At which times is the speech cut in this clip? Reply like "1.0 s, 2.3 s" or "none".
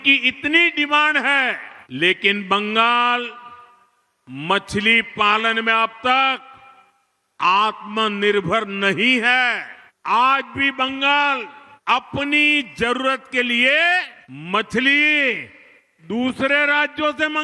none